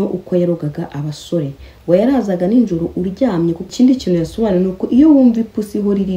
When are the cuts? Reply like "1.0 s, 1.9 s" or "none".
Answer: 3.6 s

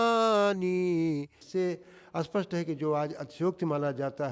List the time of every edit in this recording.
1.4 s

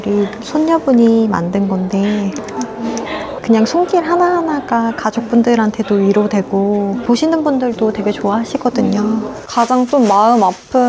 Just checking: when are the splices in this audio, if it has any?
2.4 s, 9.4 s

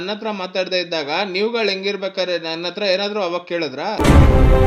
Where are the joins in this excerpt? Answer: none

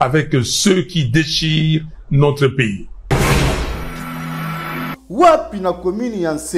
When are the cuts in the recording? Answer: 2.9 s, 4.8 s

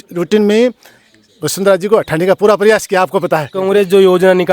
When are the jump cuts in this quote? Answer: 3.6 s

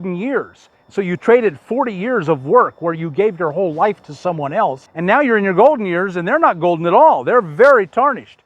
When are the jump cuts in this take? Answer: 4.9 s

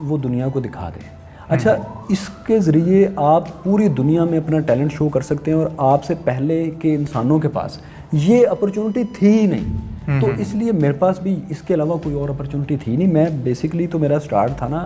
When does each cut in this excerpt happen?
none

